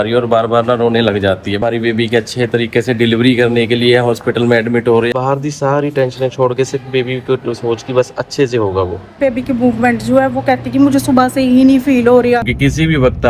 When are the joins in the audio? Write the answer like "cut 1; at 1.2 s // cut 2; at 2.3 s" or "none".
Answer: cut 1; at 1.6 s // cut 2; at 5.1 s // cut 3; at 9.1 s // cut 4; at 12.5 s

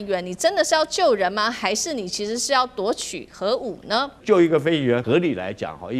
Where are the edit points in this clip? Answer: cut 1; at 4.2 s // cut 2; at 5.0 s

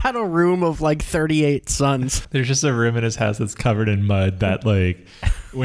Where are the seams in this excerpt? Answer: cut 1; at 2.2 s

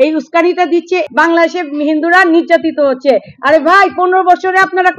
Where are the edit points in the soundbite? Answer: cut 1; at 1.0 s

